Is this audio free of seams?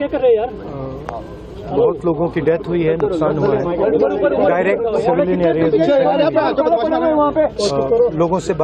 yes; 0 cuts

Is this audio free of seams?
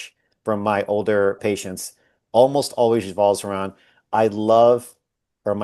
no; 1 cut; at 1.4 s

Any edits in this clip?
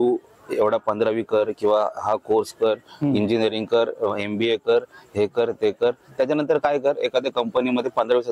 no; 0 cuts

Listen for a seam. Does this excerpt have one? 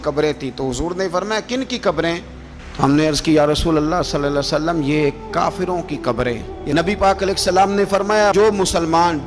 yes; 1 cut; at 6.5 s

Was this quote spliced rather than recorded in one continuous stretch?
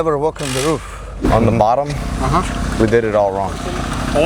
yes; 1 cut; at 1.0 s

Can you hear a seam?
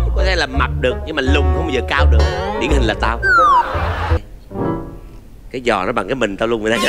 yes; 1 cut; at 4.2 s

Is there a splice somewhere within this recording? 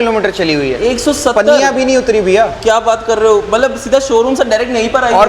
no; 0 cuts

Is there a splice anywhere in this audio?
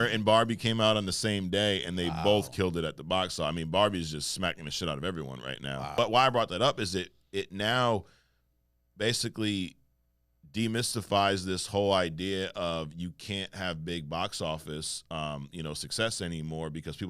yes; 1 cut; at 6.0 s

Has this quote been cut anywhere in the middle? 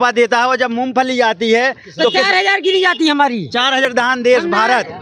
yes; 1 cut; at 3.9 s

